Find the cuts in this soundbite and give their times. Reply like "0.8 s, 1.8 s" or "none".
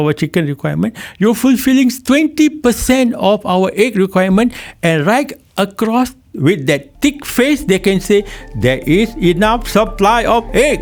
none